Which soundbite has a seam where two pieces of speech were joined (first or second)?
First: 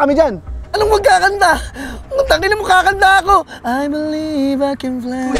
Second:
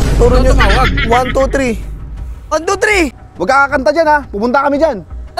second